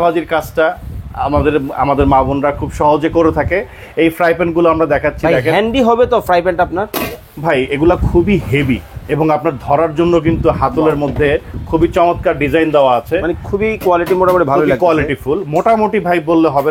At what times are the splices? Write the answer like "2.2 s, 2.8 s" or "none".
none